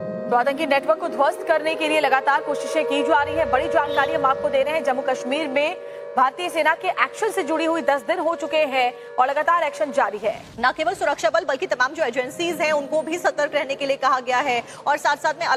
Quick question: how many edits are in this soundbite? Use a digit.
0